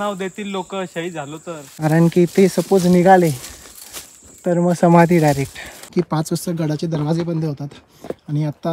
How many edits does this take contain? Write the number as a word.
two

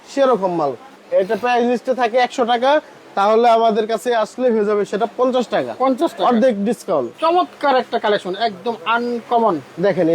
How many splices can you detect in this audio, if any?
two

